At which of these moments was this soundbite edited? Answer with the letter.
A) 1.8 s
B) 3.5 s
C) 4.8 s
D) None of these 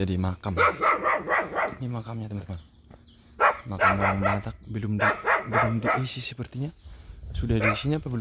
D